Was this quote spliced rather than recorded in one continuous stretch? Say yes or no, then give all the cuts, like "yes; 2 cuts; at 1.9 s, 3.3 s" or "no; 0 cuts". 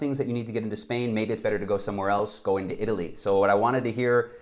no; 0 cuts